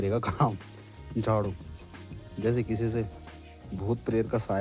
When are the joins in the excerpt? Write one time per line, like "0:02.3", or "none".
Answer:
none